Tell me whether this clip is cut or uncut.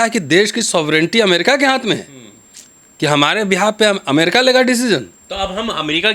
cut